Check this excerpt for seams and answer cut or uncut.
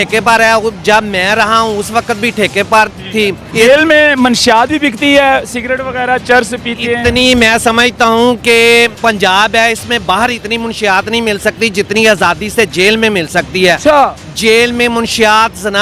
cut